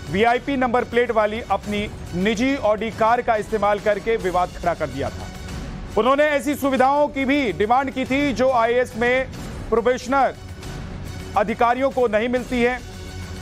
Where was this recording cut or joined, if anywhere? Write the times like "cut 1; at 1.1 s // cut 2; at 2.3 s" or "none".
cut 1; at 11.7 s